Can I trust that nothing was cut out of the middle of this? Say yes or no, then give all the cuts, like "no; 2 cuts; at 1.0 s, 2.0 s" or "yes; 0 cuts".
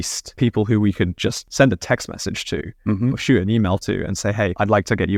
yes; 0 cuts